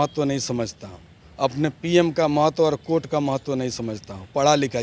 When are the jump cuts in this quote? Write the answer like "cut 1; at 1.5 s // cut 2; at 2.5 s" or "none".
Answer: none